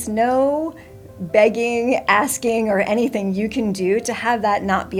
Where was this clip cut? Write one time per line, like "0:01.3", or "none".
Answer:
none